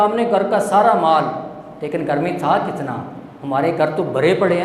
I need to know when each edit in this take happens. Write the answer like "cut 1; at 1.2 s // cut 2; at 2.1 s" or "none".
none